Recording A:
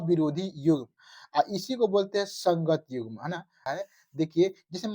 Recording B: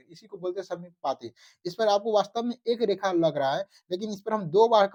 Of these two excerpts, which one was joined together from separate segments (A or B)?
A